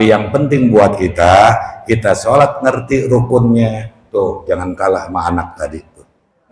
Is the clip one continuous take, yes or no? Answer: yes